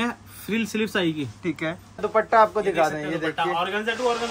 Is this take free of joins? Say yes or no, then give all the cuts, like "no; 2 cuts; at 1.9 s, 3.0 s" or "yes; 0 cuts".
no; 1 cut; at 2.0 s